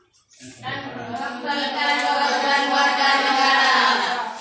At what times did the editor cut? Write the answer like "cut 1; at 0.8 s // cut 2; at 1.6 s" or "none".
none